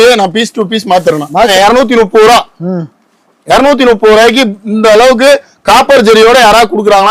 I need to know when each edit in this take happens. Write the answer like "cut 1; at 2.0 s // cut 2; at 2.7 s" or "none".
cut 1; at 1.5 s